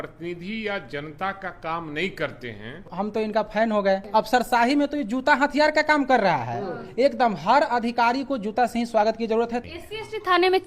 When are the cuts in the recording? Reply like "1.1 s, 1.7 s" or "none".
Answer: 2.9 s, 4.0 s, 9.6 s